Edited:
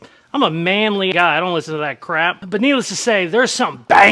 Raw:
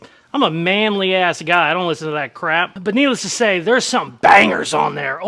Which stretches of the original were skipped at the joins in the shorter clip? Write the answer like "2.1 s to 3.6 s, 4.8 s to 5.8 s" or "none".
1.1 s to 1.4 s